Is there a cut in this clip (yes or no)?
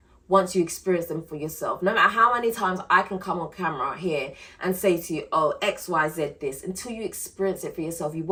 no